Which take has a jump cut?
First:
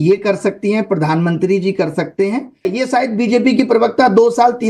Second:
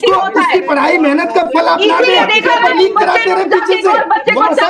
first; 1 cut; at 2.7 s

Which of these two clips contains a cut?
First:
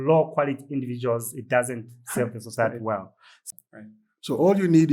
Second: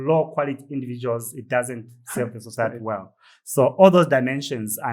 first; 1 cut; at 3.4 s

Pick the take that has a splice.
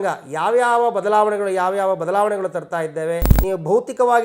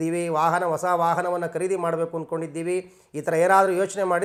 first; 1 cut; at 3.3 s

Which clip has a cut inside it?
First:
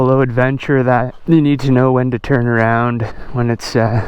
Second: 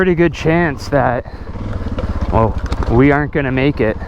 first; 2 cuts; at 1.1 s, 3.2 s

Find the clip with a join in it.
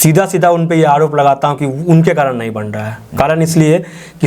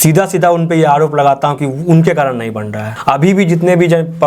second; 1 cut; at 2.9 s

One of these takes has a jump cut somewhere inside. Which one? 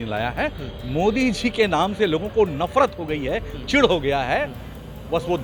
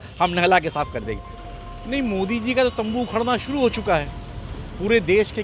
second; 1 cut; at 1.3 s

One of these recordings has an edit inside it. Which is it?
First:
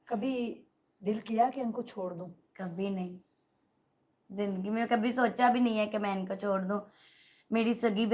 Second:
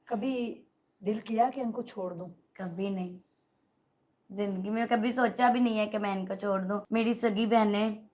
second; 1 cut; at 6.8 s

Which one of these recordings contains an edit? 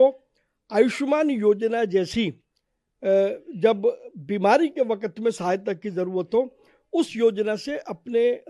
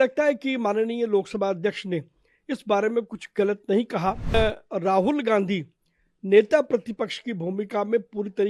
second; 1 cut; at 4.3 s

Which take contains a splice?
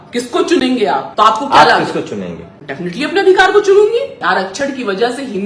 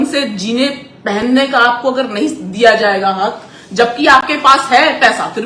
first; 2 cuts; at 1.1 s, 4.2 s

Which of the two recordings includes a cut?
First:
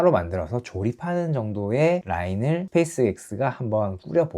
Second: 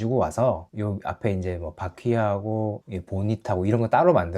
second; 1 cut; at 2.8 s

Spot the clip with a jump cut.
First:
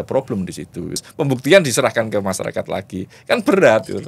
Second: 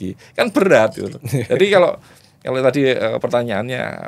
first; 1 cut; at 1.1 s

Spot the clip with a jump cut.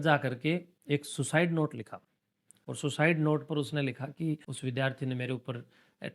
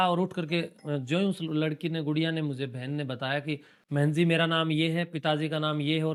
first; 1 cut; at 4.5 s

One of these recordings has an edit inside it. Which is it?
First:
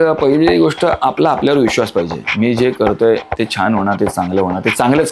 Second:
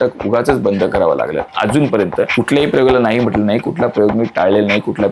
second; 2 cuts; at 1.5 s, 2.3 s

